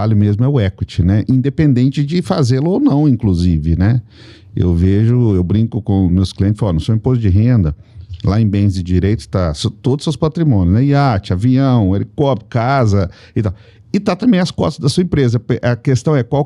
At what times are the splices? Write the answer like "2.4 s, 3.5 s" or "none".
none